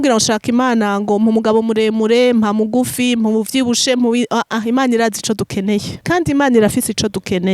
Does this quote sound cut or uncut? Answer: cut